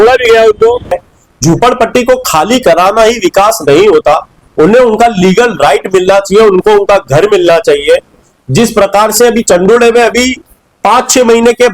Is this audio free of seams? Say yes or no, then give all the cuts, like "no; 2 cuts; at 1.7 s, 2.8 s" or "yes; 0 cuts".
no; 1 cut; at 1.0 s